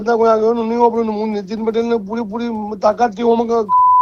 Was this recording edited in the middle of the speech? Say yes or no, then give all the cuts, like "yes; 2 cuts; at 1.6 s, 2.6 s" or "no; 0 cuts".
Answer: no; 0 cuts